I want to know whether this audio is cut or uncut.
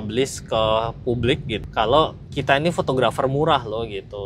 cut